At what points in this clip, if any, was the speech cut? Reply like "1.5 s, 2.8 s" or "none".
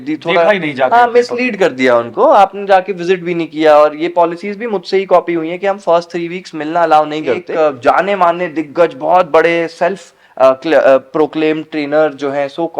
7.4 s